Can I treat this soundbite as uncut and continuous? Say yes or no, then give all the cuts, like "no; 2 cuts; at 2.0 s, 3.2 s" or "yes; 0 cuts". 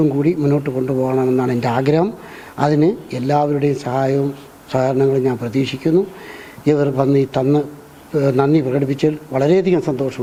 yes; 0 cuts